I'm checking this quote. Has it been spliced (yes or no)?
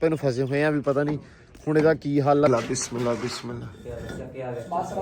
yes